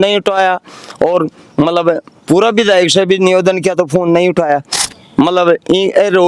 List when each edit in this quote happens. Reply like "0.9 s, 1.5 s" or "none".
4.8 s